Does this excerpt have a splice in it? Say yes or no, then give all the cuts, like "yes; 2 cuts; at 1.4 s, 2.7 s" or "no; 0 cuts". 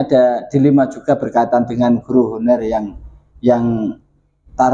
no; 0 cuts